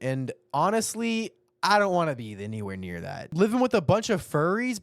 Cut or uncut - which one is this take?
cut